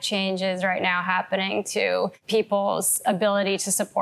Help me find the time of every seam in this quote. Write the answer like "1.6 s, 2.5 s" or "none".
2.2 s